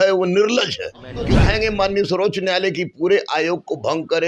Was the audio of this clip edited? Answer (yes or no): yes